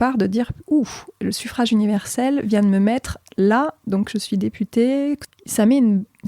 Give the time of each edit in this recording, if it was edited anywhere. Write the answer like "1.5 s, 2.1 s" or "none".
5.3 s